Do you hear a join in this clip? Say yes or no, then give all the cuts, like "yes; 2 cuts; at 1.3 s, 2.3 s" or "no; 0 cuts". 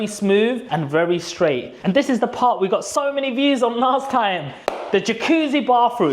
yes; 1 cut; at 1.7 s